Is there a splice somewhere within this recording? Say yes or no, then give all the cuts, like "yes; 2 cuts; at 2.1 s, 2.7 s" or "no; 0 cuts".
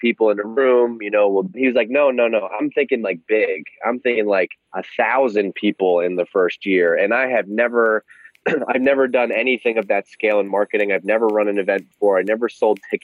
yes; 1 cut; at 1.6 s